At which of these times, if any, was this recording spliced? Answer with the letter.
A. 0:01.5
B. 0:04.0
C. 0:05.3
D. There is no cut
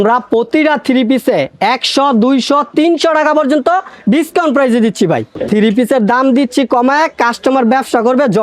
C